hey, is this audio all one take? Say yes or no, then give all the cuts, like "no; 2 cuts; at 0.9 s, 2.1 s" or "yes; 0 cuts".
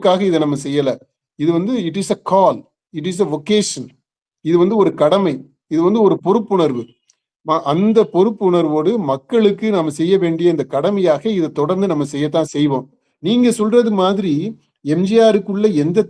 no; 1 cut; at 13.1 s